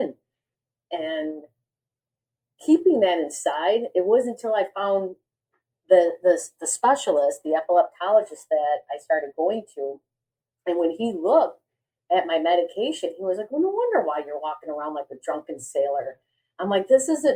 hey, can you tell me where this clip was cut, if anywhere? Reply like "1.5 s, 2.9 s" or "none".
none

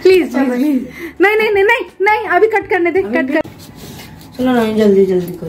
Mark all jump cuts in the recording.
3.4 s

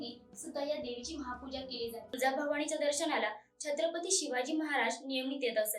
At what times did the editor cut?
2.1 s

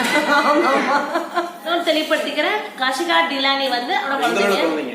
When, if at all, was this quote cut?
1.7 s, 4.1 s

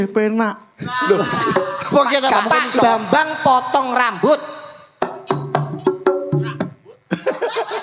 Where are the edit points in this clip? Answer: 2.3 s

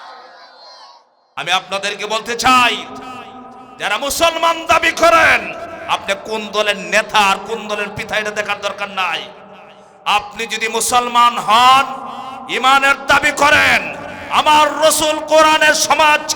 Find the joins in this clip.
1.3 s

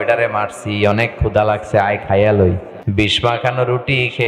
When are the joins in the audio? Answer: 2.7 s

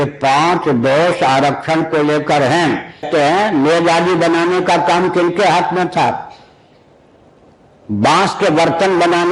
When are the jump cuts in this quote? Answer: 3.1 s

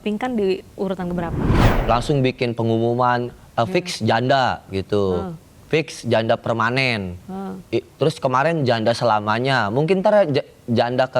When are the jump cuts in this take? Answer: 1.6 s

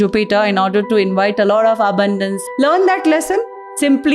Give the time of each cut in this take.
2.4 s

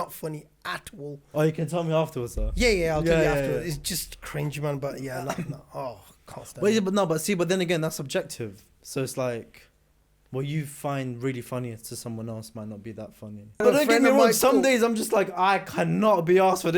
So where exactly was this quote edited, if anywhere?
13.6 s

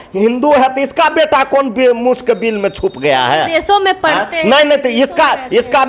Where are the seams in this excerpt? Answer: none

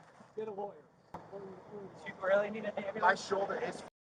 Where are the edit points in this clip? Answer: 1.9 s

